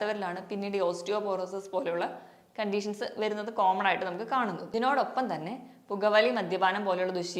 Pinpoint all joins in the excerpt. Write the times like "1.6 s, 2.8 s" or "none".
4.6 s